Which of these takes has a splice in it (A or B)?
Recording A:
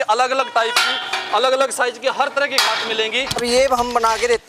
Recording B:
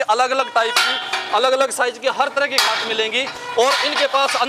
A